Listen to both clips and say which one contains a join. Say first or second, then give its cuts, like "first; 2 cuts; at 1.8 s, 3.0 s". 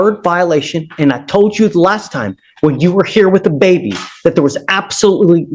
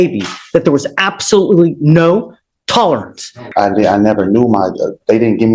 second; 1 cut; at 3.4 s